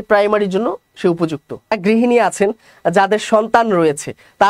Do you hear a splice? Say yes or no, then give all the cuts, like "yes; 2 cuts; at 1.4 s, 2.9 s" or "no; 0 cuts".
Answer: yes; 1 cut; at 1.8 s